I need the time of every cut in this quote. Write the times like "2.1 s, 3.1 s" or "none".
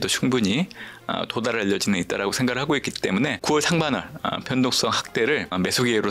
3.4 s